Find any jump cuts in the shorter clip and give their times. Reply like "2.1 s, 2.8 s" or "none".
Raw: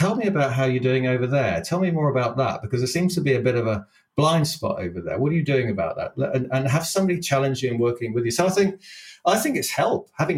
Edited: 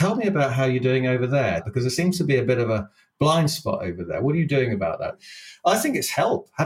1.7 s, 5.2 s